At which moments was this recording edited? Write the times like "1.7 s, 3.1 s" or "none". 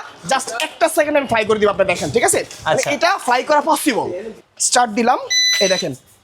4.3 s